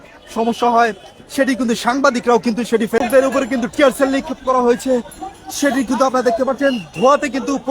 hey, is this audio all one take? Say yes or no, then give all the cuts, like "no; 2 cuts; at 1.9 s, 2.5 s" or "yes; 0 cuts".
no; 1 cut; at 3.0 s